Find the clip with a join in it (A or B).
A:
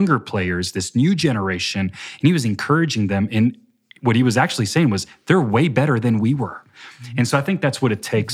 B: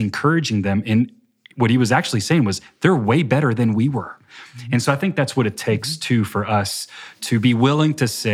B